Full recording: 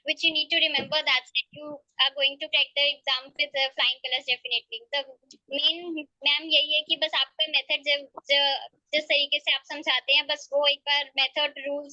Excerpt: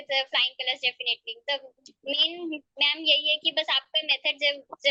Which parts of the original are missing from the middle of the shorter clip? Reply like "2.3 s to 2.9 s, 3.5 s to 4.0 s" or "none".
none